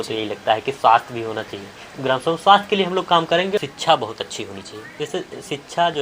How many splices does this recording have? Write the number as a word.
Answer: one